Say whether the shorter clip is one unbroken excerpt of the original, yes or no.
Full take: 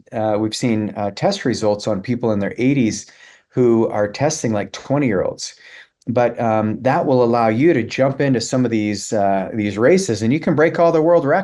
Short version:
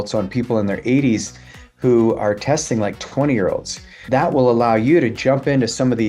no